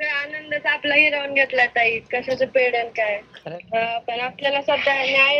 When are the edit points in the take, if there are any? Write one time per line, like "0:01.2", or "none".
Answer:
0:03.3